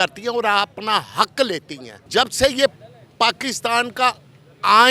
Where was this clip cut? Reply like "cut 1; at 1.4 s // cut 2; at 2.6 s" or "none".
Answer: cut 1; at 2.0 s